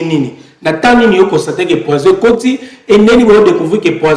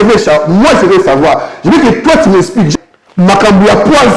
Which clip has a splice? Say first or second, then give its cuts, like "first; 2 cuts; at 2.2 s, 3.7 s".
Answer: second; 1 cut; at 2.7 s